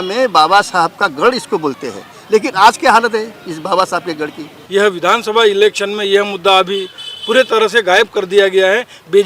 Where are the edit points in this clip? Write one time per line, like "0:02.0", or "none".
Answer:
0:04.5